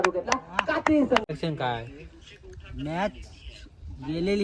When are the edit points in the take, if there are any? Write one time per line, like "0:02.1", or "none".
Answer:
0:01.2